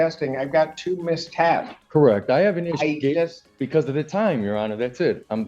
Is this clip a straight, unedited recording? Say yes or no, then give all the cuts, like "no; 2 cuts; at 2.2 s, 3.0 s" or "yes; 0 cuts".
yes; 0 cuts